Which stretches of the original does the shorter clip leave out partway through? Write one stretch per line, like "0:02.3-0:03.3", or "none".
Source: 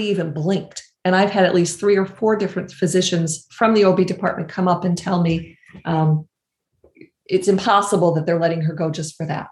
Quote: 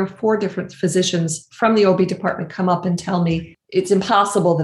0:05.5-0:07.1